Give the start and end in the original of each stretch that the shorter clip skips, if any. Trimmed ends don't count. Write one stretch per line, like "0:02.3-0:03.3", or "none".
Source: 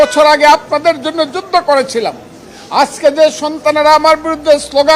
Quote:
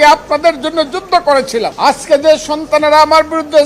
0:02.1-0:02.7